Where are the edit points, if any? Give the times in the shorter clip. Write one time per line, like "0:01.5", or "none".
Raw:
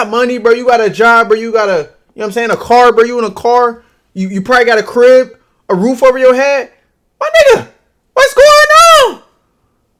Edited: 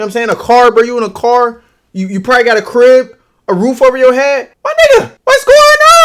0:04.6
0:05.1